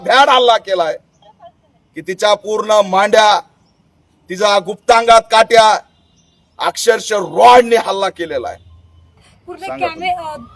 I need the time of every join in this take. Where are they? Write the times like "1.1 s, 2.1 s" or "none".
9.2 s